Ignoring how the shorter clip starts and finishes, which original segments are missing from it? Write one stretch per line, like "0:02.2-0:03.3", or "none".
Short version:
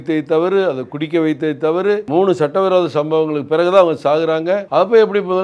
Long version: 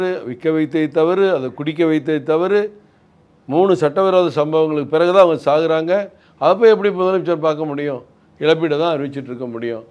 0:02.7-0:03.5
0:06.1-0:06.3